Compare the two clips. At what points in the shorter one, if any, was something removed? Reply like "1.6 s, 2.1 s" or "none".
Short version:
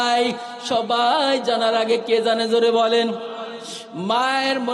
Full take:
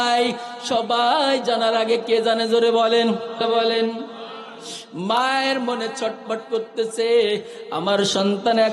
3.3 s